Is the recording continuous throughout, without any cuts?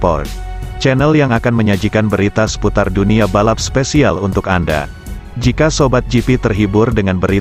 yes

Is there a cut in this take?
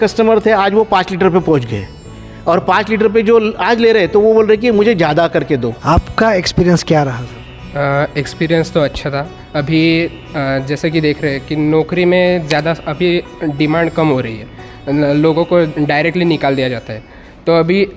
yes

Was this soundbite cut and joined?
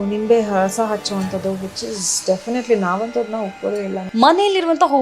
yes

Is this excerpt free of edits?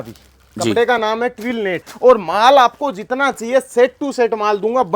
no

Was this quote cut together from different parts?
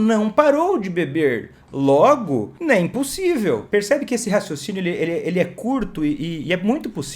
yes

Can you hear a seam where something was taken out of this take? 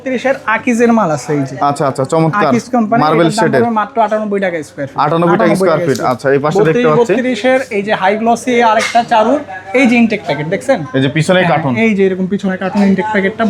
no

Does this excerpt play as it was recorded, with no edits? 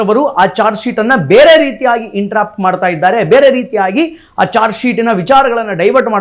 yes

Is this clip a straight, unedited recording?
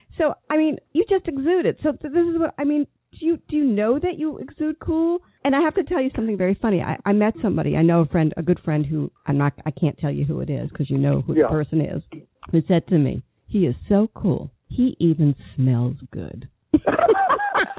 yes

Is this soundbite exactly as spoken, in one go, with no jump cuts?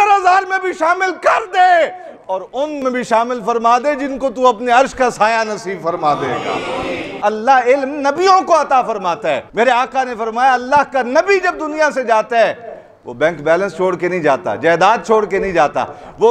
no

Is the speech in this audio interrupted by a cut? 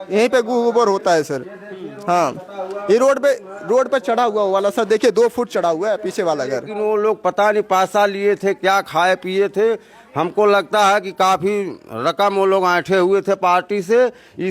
yes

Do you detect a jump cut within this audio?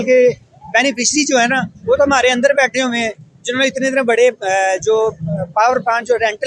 no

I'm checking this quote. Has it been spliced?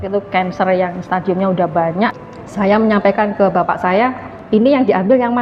yes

